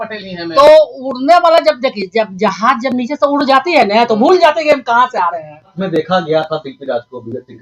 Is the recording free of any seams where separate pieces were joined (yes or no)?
no